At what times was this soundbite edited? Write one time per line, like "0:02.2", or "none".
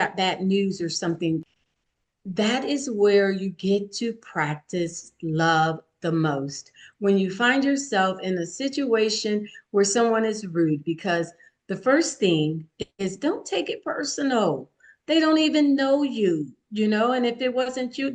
0:01.5